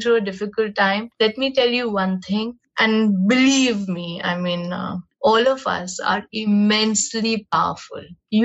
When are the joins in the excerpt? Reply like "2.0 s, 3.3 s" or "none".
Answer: 1.1 s, 5.0 s